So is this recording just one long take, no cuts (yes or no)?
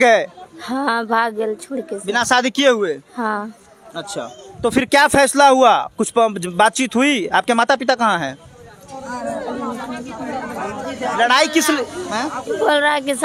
yes